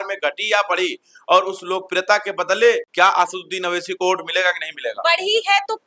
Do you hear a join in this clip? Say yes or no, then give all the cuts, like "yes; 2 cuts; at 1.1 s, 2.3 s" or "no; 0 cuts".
no; 0 cuts